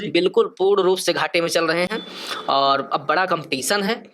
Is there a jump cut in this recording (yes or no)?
no